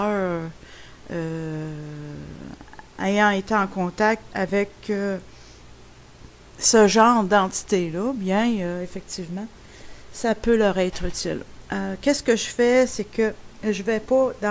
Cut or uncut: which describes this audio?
uncut